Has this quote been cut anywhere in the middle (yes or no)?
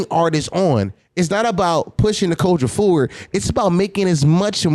no